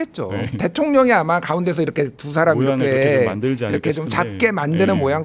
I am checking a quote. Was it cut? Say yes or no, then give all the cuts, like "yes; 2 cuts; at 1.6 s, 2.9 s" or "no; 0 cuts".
no; 0 cuts